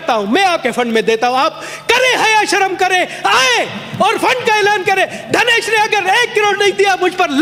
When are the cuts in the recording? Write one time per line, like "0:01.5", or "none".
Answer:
none